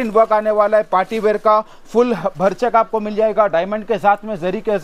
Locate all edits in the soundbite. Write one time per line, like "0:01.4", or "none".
none